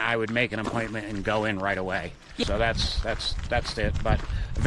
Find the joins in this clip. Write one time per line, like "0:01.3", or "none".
0:02.4